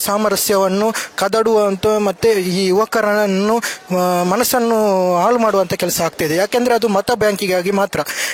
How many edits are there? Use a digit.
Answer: 0